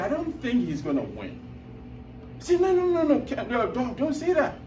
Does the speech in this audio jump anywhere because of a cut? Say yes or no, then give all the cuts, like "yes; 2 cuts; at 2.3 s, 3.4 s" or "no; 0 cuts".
no; 0 cuts